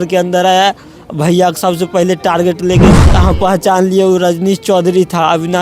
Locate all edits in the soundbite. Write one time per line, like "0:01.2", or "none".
0:03.0